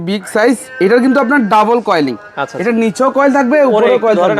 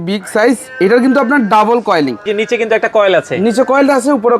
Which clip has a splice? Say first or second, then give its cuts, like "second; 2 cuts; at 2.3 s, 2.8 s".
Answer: second; 1 cut; at 2.3 s